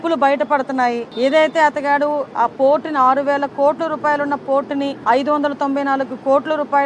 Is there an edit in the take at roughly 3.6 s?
no; 2 cuts; at 1.1 s, 5.0 s

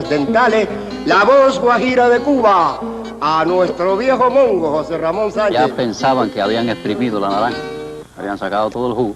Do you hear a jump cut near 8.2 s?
no; 1 cut; at 5.5 s

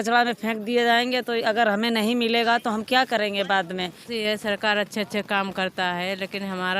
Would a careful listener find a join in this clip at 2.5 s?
no; 1 cut; at 4.0 s

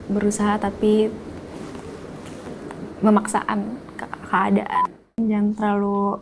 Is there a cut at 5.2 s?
yes; 1 cut; at 5.2 s

